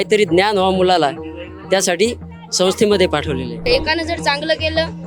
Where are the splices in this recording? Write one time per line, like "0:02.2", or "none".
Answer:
0:03.7